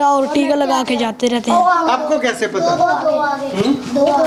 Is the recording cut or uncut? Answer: uncut